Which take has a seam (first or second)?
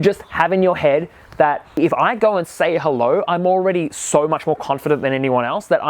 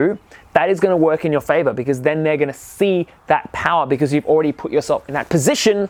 first